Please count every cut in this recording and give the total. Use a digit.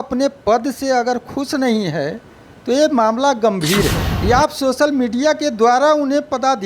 1